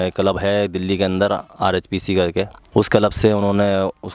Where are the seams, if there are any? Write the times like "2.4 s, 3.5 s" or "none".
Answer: 2.6 s